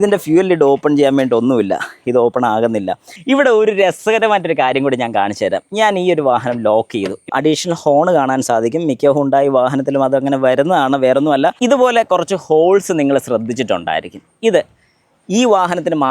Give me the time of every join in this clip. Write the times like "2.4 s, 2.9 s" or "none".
3.1 s, 7.3 s, 11.6 s